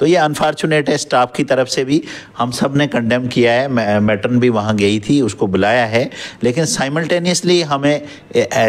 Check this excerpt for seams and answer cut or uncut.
uncut